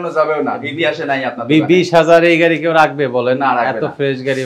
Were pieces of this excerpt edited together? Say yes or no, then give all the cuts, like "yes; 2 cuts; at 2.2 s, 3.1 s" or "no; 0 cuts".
no; 0 cuts